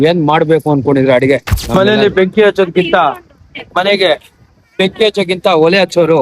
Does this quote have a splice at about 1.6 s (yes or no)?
yes